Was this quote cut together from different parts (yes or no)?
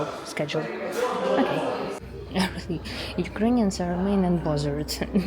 yes